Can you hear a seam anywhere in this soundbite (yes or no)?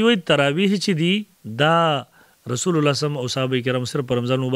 yes